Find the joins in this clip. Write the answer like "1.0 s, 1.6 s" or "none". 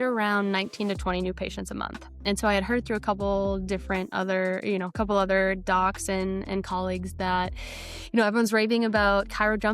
2.2 s